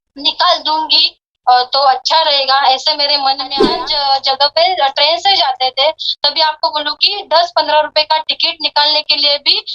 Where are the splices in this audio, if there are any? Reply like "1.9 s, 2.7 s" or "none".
3.6 s